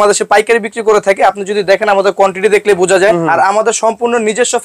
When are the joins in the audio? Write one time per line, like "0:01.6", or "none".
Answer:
0:03.2

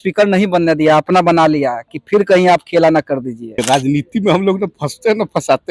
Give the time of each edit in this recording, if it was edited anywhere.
0:03.6

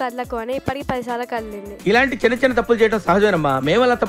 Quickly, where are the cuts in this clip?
none

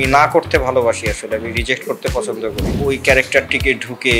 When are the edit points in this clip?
0:02.7

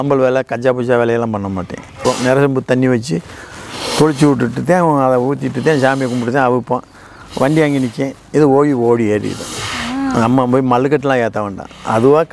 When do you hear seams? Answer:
0:02.0

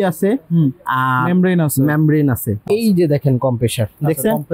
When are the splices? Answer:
0:02.7

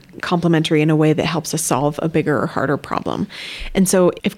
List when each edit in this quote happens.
none

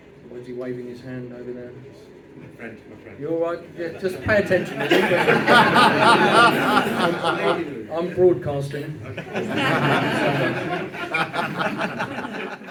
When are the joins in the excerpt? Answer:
none

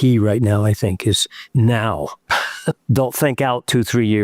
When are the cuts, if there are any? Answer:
0:01.3
0:02.3

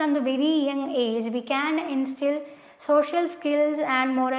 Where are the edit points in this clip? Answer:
none

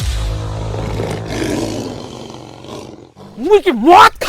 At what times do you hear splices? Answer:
none

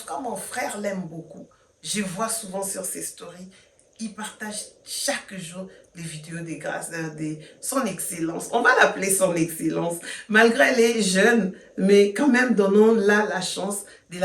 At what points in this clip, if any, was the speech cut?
none

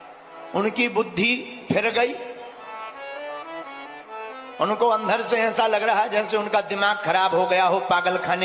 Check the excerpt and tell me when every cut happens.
0:03.7

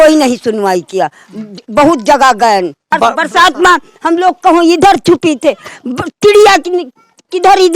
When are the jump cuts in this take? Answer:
0:02.9

